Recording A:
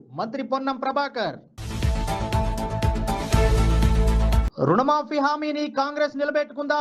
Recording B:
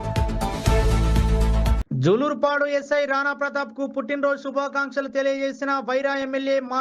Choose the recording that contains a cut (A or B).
B